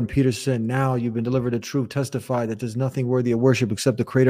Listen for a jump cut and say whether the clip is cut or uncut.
uncut